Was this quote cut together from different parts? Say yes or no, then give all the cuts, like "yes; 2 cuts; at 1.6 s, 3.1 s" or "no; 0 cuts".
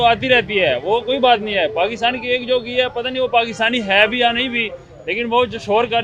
no; 0 cuts